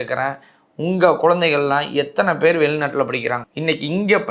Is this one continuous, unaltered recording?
yes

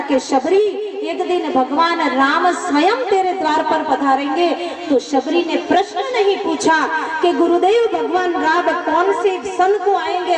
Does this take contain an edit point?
no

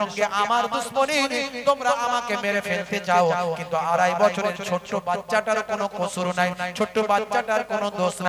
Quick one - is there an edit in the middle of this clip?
no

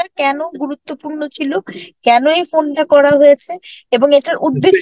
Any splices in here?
no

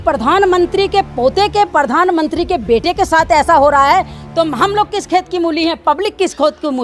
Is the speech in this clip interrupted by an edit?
no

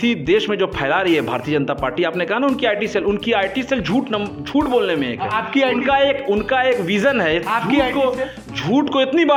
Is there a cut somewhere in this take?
no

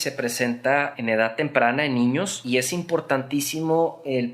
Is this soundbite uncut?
no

